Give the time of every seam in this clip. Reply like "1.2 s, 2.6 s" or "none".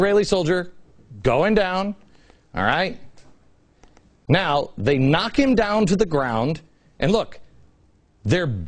none